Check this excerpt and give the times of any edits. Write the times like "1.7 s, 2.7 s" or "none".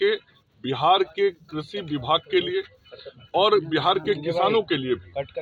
none